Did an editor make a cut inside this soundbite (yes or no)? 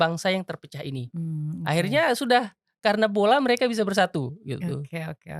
no